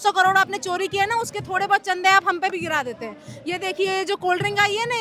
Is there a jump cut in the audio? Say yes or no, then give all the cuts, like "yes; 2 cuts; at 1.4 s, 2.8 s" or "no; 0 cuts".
no; 0 cuts